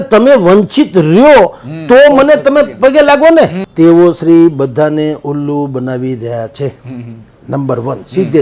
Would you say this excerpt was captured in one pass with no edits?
no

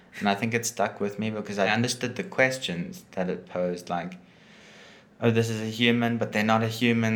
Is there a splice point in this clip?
yes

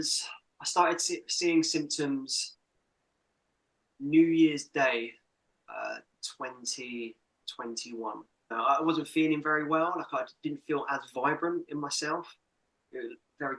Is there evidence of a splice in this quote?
yes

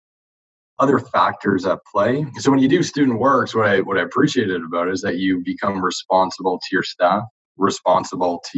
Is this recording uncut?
no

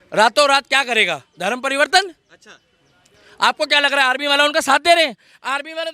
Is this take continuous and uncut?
yes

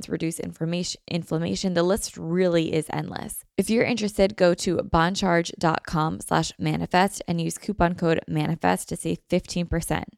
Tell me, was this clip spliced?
yes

